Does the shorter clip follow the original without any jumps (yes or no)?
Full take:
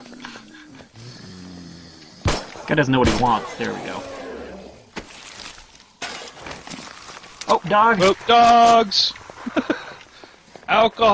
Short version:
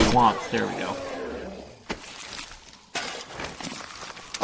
yes